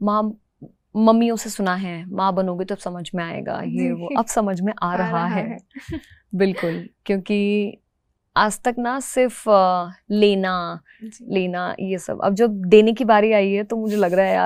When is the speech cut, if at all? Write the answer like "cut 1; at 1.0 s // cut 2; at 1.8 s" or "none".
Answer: none